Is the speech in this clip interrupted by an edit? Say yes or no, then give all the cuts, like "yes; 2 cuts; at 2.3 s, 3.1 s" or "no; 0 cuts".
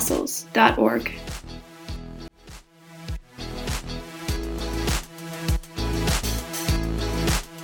yes; 1 cut; at 1.1 s